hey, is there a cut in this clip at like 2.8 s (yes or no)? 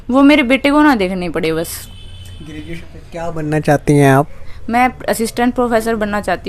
yes